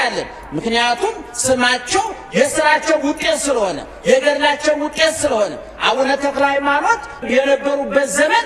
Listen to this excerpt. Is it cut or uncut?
cut